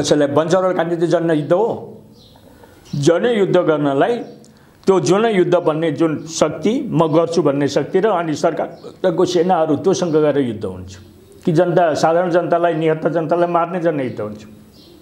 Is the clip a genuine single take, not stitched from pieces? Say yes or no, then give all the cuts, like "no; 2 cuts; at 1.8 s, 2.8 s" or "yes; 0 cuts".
yes; 0 cuts